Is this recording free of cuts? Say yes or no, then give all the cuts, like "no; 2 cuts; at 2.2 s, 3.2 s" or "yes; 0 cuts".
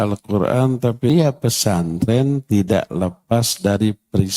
no; 1 cut; at 1.1 s